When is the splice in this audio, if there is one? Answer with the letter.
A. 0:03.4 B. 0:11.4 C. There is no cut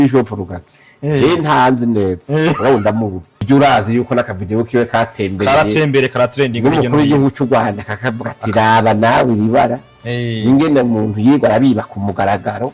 A